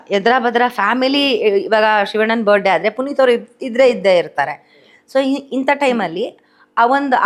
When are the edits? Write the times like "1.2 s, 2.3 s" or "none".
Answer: none